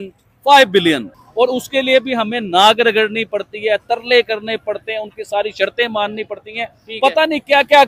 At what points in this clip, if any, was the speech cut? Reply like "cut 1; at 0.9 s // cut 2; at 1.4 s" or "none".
cut 1; at 1.1 s